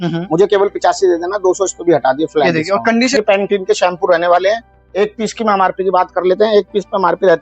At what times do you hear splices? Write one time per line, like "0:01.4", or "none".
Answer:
0:03.1